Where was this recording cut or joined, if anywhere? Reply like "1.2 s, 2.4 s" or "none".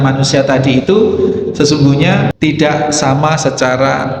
2.3 s